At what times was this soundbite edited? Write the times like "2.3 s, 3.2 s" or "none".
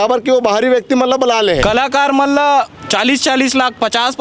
1.6 s